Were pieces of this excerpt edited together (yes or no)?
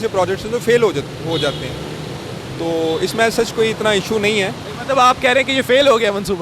no